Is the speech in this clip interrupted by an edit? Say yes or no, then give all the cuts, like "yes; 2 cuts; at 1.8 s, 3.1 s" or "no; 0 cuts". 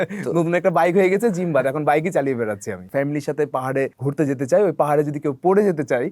yes; 2 cuts; at 2.8 s, 4.0 s